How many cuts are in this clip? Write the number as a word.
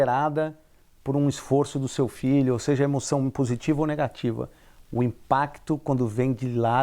zero